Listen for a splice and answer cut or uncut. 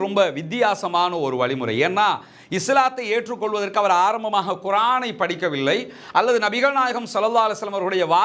uncut